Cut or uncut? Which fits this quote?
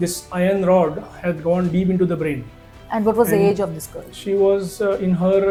uncut